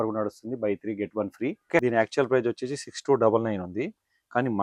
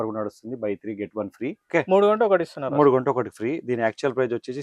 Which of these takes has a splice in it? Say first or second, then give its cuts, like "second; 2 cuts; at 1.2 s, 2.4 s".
first; 1 cut; at 1.8 s